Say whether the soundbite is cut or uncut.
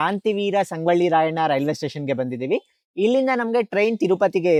uncut